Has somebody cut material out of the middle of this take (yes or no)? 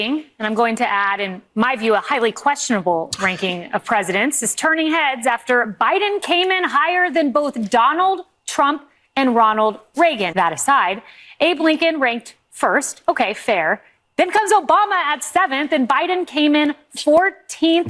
yes